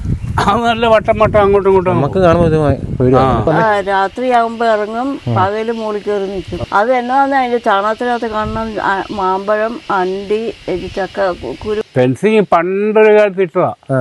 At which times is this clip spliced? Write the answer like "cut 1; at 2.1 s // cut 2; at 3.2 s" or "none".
cut 1; at 3.5 s // cut 2; at 6.5 s // cut 3; at 11.8 s